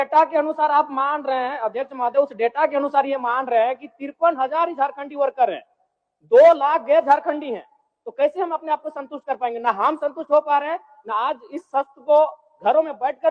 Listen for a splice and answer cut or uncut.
uncut